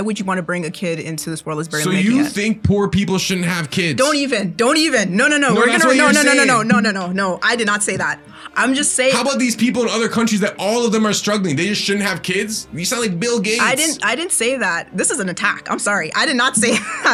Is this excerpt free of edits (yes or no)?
yes